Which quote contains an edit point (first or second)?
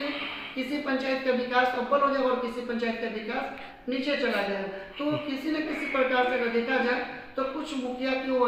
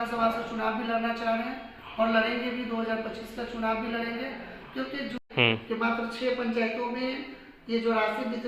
second